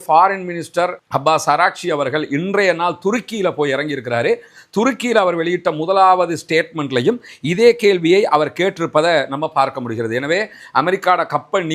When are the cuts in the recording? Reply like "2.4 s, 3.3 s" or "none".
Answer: 10.6 s